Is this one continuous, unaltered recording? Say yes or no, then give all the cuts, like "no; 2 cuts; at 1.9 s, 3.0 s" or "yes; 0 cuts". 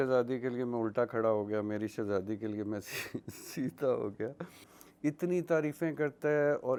yes; 0 cuts